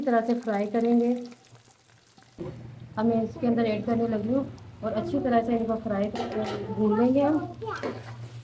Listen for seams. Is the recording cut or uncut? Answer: cut